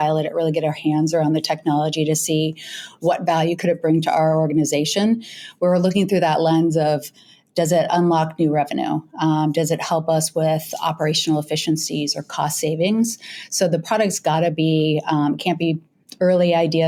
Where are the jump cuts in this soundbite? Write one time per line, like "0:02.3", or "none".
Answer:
none